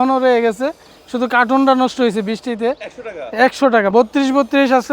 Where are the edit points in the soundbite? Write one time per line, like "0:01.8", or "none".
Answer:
0:03.9